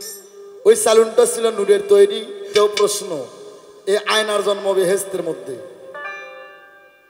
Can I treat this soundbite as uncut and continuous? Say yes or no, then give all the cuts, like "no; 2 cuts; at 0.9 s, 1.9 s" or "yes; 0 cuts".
no; 1 cut; at 2.5 s